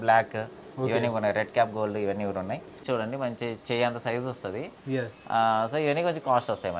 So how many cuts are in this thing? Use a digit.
1